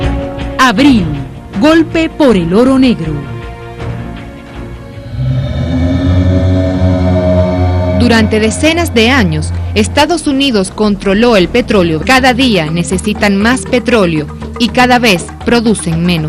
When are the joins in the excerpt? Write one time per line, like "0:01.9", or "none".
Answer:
none

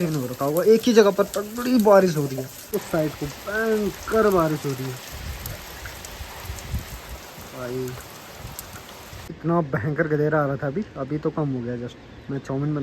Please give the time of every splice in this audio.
0:02.5
0:09.3

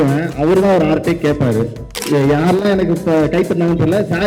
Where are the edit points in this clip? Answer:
0:02.0

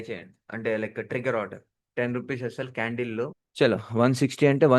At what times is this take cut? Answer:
0:01.8

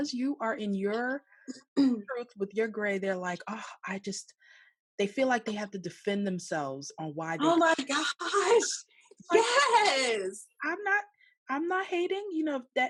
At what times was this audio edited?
none

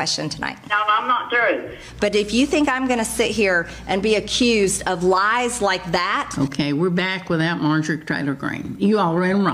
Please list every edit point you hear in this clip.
0:01.8
0:06.4

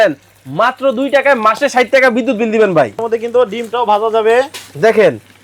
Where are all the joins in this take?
0:03.0

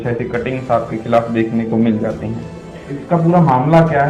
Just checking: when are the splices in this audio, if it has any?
0:03.0

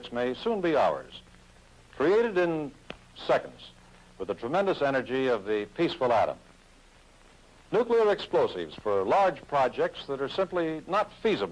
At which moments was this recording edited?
0:10.6

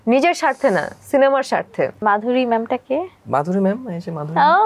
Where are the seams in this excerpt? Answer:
0:02.0

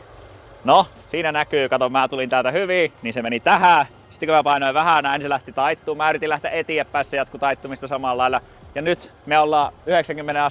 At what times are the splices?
none

